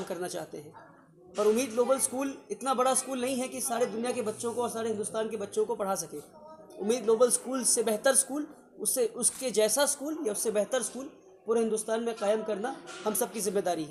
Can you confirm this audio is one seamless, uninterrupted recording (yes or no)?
yes